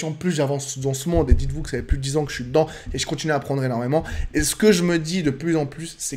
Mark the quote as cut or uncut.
uncut